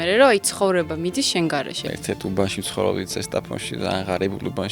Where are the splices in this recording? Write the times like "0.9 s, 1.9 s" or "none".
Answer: 1.8 s